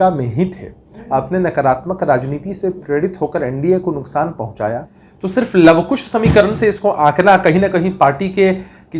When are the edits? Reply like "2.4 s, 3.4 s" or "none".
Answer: 4.9 s